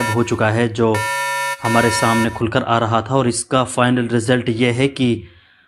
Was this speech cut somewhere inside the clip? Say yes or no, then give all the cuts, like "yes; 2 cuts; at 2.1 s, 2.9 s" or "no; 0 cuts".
no; 0 cuts